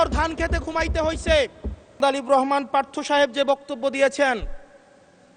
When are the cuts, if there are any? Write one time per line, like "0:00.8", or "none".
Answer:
0:02.0